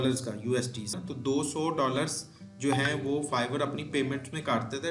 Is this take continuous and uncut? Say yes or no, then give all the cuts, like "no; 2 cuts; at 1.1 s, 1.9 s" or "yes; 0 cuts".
no; 1 cut; at 1.0 s